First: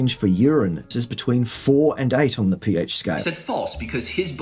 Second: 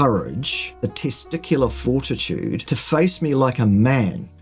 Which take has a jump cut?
first; 2 cuts; at 0.9 s, 3.3 s

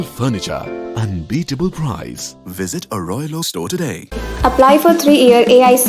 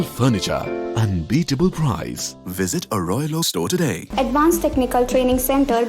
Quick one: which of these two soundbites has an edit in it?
second; 1 cut; at 4.0 s

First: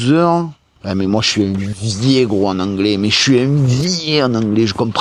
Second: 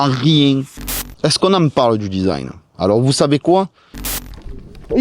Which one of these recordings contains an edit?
second; 2 cuts; at 0.9 s, 4.0 s

